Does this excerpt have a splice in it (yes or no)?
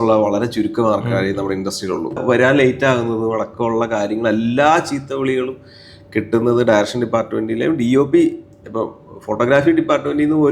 yes